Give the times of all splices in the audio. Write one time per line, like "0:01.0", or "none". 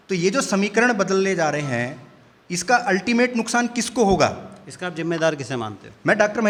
none